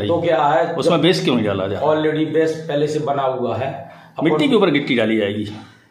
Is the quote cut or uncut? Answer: uncut